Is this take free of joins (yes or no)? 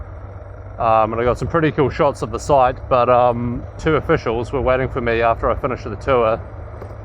no